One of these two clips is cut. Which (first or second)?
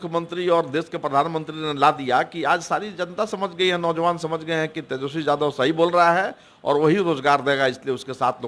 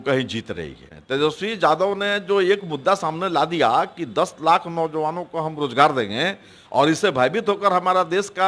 second